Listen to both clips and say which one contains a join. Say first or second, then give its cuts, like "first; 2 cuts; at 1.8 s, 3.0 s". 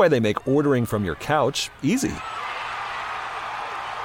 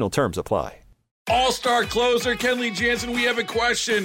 second; 1 cut; at 1.1 s